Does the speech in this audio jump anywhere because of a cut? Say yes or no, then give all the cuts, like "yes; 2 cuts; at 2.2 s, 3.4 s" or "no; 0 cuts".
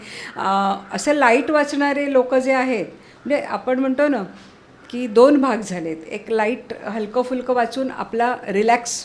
no; 0 cuts